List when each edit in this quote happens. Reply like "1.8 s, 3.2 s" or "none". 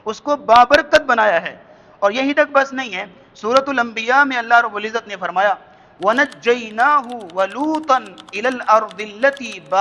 none